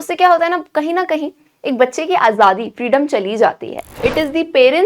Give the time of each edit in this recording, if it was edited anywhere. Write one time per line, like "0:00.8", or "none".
0:03.9